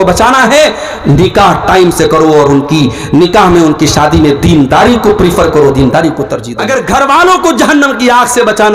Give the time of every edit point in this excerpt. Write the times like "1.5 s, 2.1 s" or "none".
6.5 s